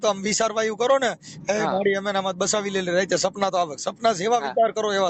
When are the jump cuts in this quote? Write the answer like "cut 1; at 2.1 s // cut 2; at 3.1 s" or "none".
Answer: none